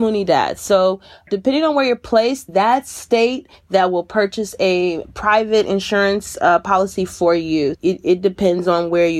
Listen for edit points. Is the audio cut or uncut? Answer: uncut